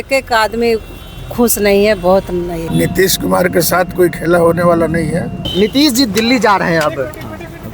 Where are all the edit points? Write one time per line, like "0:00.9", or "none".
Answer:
0:02.6
0:05.4